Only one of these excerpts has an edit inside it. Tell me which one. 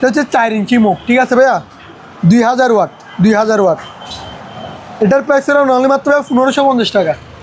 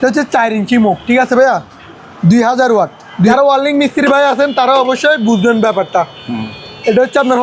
second; 1 cut; at 3.3 s

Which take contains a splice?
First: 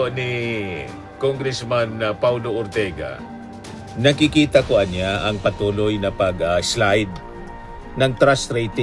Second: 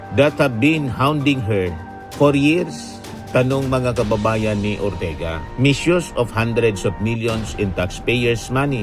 second; 1 cut; at 5.5 s

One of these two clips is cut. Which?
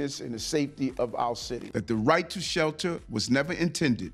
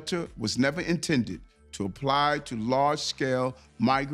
first; 1 cut; at 1.7 s

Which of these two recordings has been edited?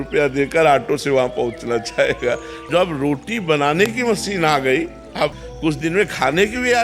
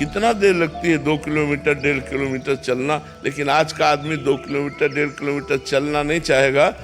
first; 2 cuts; at 2.6 s, 5.5 s

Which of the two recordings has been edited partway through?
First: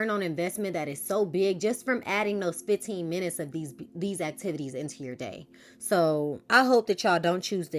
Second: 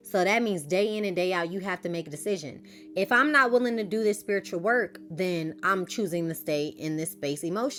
first; 1 cut; at 6.3 s

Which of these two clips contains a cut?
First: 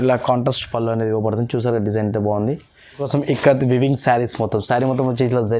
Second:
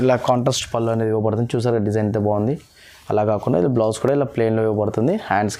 first; 1 cut; at 3.0 s

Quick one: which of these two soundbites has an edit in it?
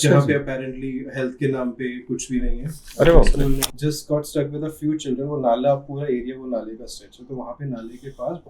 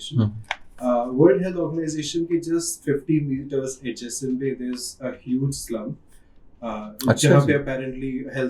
first; 1 cut; at 3.7 s

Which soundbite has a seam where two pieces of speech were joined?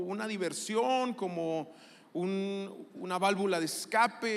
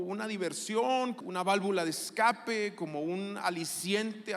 second; 1 cut; at 1.2 s

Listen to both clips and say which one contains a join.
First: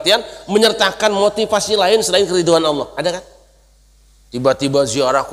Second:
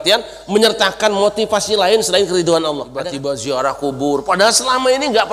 second; 1 cut; at 3.1 s

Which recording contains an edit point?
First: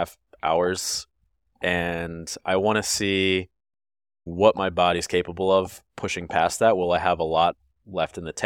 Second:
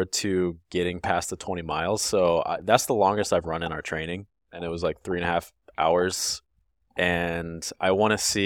first; 1 cut; at 4.3 s

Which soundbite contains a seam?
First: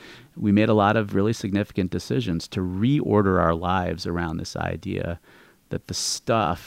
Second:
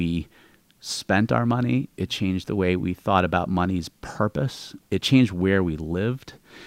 second; 1 cut; at 5.0 s

